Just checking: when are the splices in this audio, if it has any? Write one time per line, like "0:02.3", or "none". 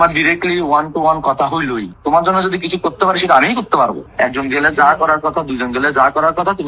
0:01.9
0:04.0

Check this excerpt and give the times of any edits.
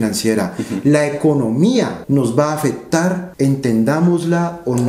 0:02.0
0:03.3

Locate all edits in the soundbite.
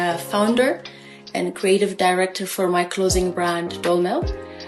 none

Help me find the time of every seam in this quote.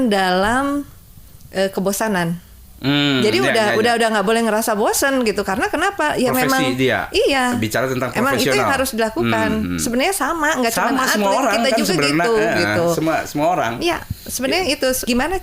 none

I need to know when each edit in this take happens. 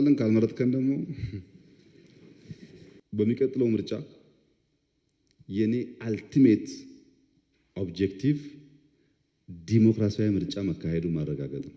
0:03.0

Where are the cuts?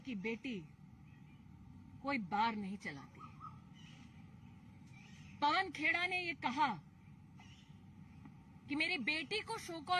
none

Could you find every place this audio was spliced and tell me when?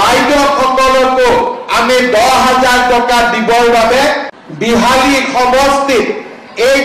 0:04.3

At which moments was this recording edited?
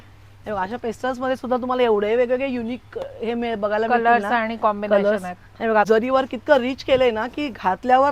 0:05.9

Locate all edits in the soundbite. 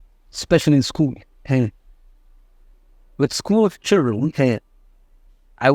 none

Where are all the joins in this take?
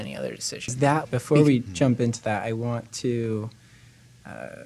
0:01.1

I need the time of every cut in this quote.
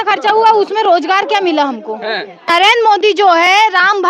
0:02.5

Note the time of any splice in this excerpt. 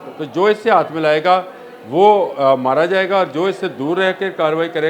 none

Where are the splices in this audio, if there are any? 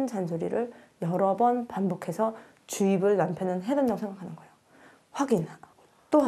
none

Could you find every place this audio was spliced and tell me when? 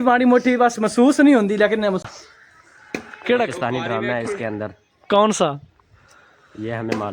0:02.0

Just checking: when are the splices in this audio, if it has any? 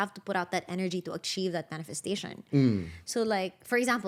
none

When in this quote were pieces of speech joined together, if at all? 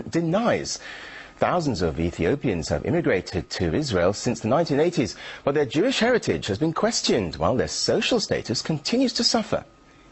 0:07.0

